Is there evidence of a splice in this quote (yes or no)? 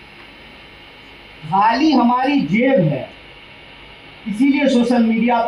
no